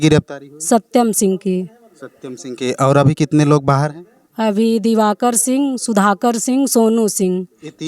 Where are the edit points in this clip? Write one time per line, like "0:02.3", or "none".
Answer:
none